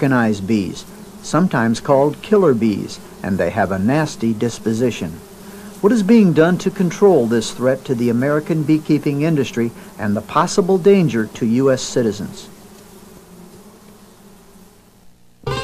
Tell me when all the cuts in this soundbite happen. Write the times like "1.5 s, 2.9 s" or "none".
8.8 s